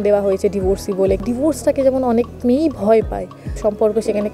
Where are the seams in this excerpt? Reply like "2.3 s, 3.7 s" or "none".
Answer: 1.2 s, 3.6 s